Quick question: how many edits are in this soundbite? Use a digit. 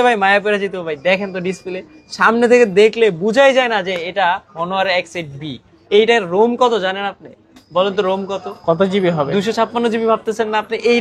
0